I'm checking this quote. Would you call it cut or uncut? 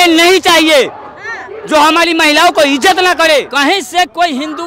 cut